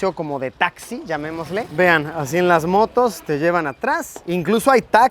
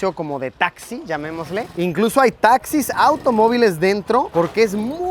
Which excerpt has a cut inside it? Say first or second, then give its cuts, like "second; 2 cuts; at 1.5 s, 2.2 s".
second; 1 cut; at 1.7 s